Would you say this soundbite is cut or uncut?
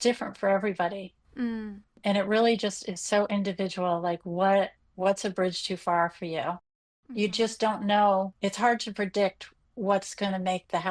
cut